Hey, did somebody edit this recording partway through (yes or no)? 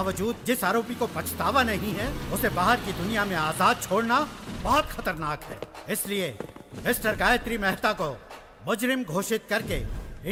no